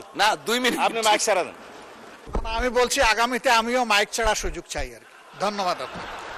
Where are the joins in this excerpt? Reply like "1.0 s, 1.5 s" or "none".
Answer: 2.3 s